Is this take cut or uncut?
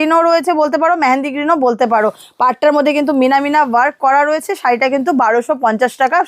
uncut